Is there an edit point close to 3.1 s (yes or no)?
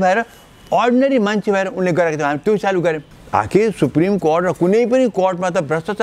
yes